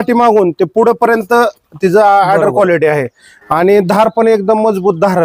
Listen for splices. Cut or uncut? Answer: uncut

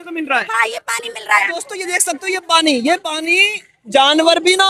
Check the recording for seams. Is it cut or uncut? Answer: uncut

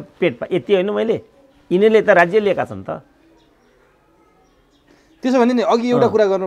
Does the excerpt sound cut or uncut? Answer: uncut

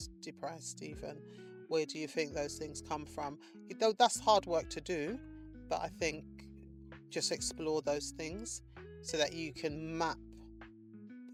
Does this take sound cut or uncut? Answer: uncut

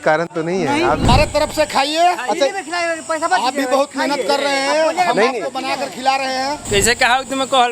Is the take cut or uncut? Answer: cut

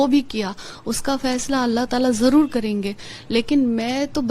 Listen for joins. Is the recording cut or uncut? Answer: uncut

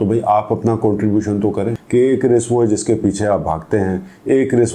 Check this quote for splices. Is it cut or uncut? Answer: cut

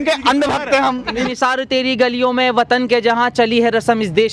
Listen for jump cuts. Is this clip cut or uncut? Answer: cut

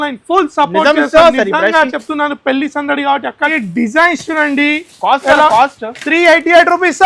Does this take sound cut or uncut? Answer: cut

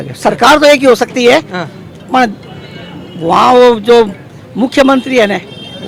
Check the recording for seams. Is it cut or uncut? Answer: uncut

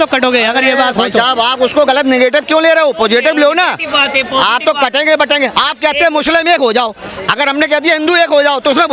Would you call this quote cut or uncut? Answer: uncut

